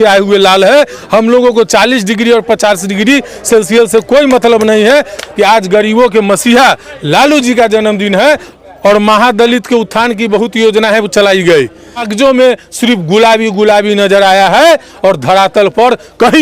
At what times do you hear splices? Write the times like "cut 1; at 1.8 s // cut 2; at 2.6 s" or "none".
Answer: cut 1; at 5.2 s // cut 2; at 8.5 s // cut 3; at 12.1 s